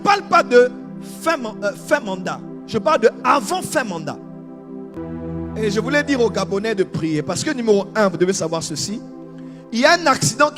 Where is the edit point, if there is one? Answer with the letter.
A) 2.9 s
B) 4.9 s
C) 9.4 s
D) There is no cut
B